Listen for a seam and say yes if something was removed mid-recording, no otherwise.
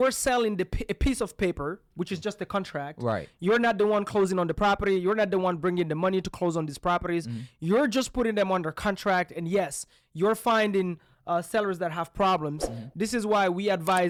no